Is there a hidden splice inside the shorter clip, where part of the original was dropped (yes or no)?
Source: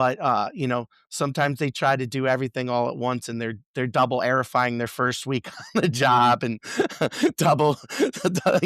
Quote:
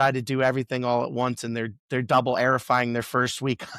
no